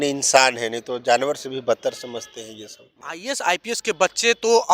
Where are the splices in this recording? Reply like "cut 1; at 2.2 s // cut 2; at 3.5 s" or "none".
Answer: cut 1; at 3.0 s